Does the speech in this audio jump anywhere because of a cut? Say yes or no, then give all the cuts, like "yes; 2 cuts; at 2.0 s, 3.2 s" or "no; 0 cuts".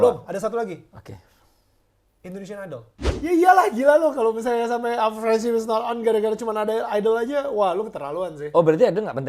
yes; 1 cut; at 3.0 s